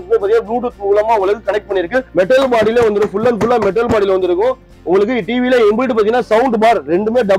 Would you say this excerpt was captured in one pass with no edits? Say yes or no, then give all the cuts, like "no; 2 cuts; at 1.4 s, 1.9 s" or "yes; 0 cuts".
no; 1 cut; at 2.1 s